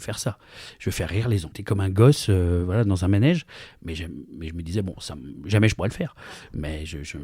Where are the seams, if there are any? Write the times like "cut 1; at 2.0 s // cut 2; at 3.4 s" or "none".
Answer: cut 1; at 1.5 s